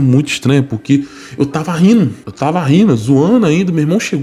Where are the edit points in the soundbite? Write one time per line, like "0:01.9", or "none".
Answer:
none